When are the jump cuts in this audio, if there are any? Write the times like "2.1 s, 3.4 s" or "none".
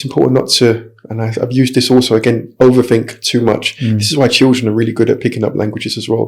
none